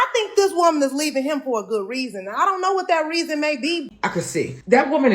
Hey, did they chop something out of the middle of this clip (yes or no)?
yes